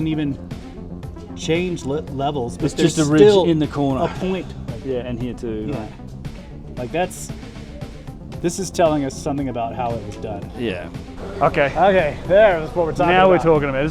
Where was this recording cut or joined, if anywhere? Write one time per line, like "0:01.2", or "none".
0:11.2